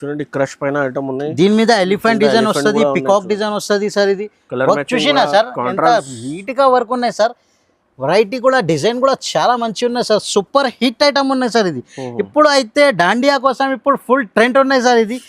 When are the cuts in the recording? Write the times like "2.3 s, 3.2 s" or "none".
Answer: none